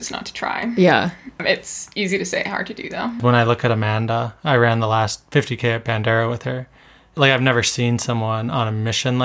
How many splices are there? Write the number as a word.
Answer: three